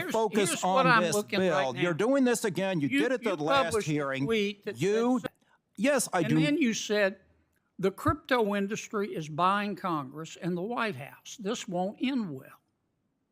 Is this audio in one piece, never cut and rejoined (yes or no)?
no